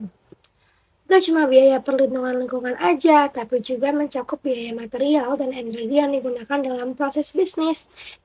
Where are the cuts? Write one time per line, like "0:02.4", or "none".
none